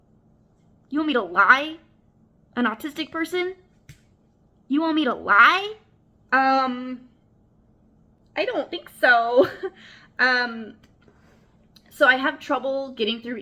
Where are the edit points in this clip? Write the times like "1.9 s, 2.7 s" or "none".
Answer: none

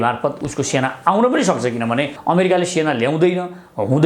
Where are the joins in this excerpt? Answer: 2.1 s

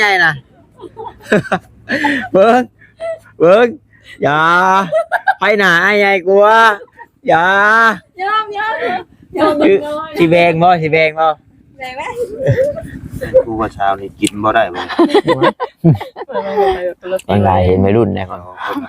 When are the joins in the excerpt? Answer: 13.7 s

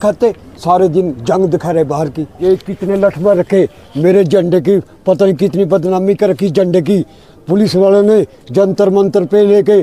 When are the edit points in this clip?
2.3 s

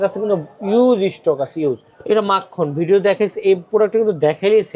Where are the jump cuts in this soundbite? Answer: 1.9 s

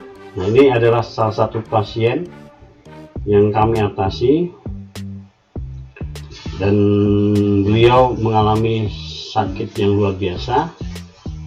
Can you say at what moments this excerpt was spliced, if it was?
4.6 s, 6.1 s

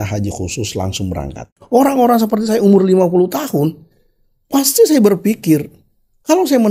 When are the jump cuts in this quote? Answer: 1.5 s

